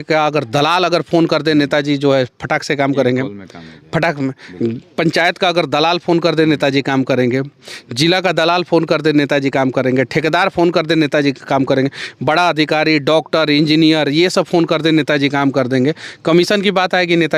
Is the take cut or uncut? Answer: uncut